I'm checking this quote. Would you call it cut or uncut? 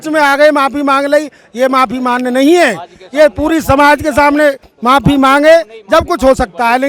uncut